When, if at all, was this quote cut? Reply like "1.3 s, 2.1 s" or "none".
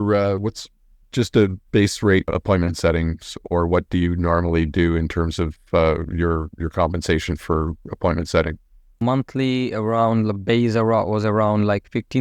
2.4 s, 9.0 s